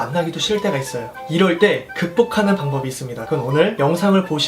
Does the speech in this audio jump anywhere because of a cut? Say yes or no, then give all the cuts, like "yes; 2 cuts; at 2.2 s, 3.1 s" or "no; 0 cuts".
yes; 1 cut; at 3.6 s